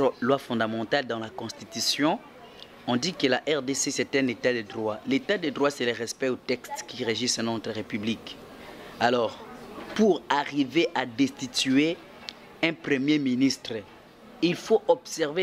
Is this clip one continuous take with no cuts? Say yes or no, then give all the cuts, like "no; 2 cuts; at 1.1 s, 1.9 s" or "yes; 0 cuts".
yes; 0 cuts